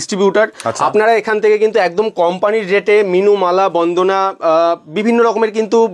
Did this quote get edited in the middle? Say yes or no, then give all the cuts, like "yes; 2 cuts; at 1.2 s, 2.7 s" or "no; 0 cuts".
no; 0 cuts